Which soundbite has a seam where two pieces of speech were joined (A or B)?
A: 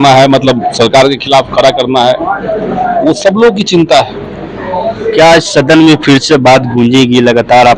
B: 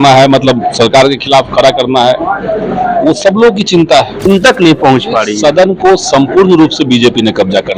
B